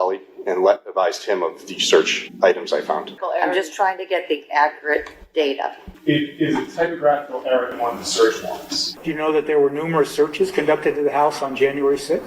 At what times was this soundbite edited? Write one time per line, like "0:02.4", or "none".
0:03.2
0:05.9
0:08.8